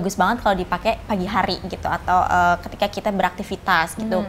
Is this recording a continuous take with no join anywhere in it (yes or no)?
no